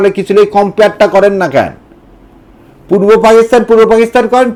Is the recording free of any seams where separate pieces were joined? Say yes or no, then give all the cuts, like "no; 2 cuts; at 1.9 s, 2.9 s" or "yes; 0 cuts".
yes; 0 cuts